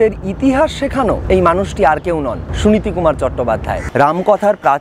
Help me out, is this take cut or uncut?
cut